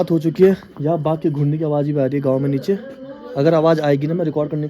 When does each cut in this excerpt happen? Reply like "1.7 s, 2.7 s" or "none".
none